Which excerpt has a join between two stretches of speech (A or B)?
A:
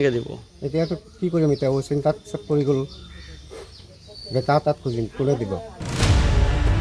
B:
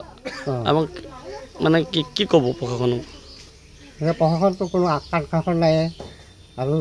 A